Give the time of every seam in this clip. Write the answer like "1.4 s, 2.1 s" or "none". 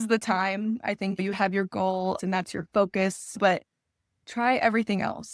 2.2 s